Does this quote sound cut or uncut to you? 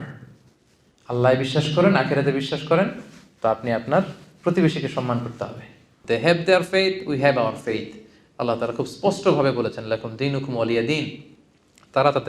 cut